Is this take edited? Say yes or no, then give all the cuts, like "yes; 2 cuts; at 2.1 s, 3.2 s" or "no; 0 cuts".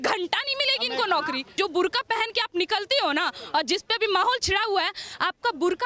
yes; 1 cut; at 1.5 s